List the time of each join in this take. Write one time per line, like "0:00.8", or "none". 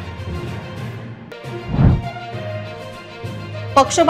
0:01.1